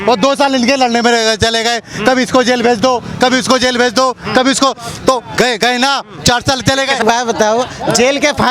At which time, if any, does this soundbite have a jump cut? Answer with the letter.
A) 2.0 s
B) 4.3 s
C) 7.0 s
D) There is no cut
C